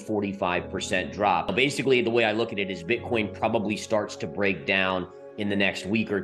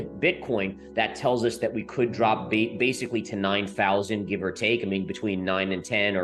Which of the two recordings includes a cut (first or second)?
first